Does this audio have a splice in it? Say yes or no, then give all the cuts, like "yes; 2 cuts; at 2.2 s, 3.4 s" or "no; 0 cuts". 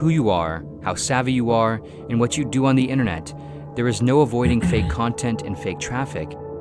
no; 0 cuts